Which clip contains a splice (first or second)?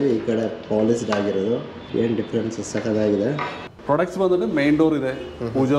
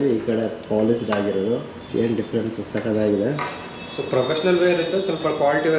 first